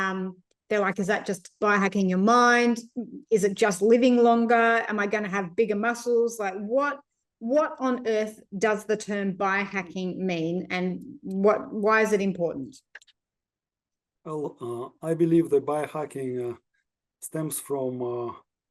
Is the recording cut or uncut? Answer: uncut